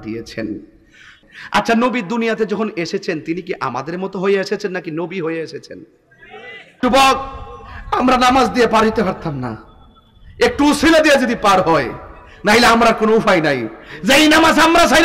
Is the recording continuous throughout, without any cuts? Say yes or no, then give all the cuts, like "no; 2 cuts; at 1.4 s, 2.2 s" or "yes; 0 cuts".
no; 2 cuts; at 1.2 s, 6.7 s